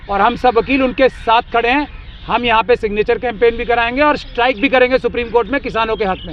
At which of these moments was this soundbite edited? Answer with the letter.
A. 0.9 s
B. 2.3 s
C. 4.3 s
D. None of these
D